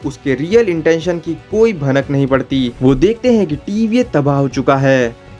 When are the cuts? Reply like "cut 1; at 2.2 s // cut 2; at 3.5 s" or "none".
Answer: cut 1; at 2.7 s